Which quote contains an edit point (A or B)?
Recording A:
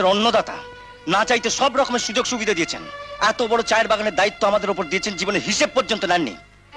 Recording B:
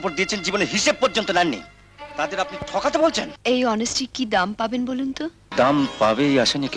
B